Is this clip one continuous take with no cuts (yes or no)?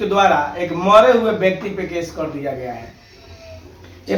yes